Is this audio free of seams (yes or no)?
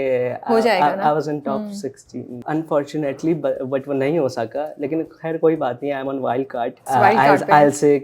no